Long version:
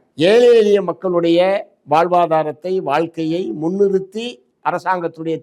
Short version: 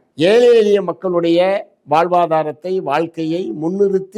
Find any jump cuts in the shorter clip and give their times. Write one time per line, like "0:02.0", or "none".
none